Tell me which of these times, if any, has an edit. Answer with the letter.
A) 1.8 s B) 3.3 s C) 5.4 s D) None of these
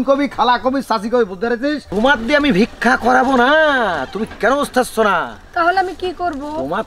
A